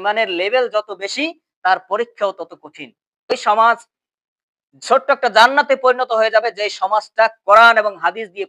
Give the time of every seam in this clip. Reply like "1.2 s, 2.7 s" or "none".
3.3 s

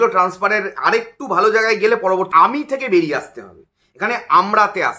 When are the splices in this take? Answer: 2.3 s

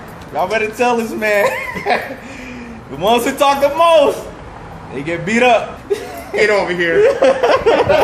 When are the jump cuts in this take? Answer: 5.7 s

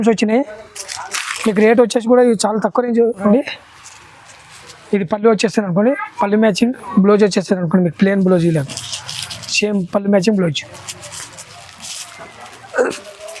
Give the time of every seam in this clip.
none

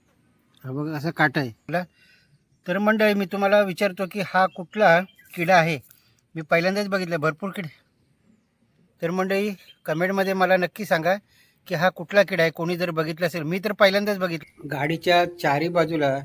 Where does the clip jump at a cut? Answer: 1.6 s, 14.4 s

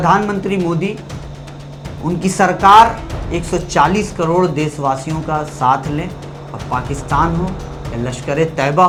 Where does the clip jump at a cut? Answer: none

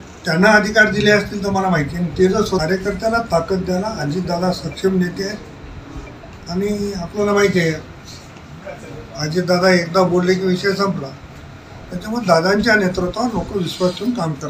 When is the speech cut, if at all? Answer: 2.6 s

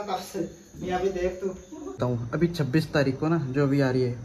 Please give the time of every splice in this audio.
2.0 s

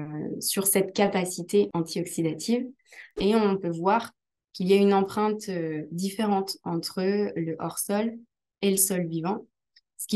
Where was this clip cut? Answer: 1.7 s, 3.1 s

